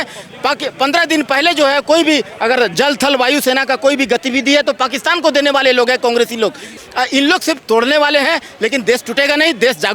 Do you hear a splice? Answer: yes; 1 cut; at 6.7 s

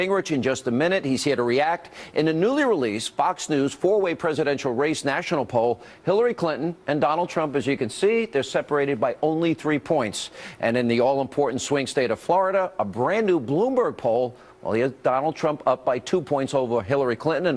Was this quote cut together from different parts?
yes; 1 cut; at 10.1 s

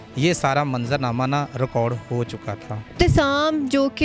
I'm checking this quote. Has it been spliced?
yes; 1 cut; at 2.9 s

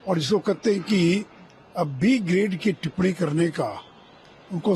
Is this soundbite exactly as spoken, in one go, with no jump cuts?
yes; 0 cuts

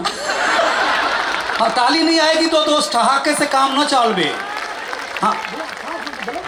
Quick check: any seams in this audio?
no; 0 cuts

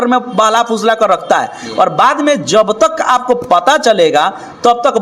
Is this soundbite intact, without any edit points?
yes; 0 cuts

